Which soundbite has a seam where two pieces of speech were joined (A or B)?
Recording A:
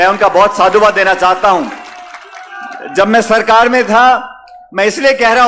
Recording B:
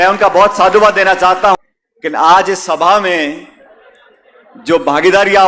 B